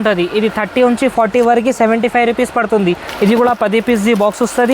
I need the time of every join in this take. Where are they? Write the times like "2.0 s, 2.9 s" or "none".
3.1 s